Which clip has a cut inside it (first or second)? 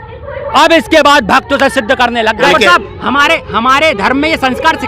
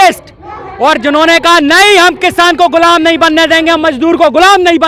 first